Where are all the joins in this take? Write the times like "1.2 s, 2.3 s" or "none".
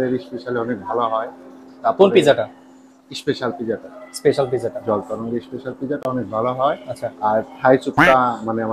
none

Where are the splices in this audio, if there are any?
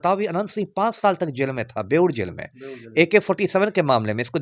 none

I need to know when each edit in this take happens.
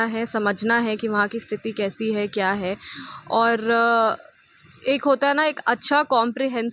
none

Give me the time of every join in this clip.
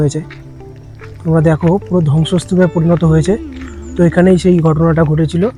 none

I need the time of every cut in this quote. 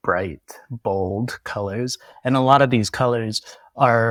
none

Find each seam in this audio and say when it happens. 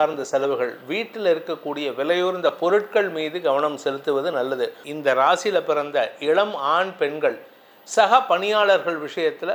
4.8 s

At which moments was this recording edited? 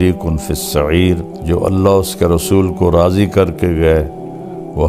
1.3 s

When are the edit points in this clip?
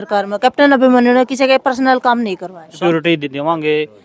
2.8 s

